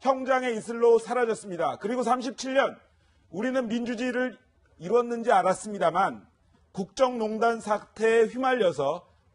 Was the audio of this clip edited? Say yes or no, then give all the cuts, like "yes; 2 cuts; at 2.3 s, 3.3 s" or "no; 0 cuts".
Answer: yes; 1 cut; at 4.1 s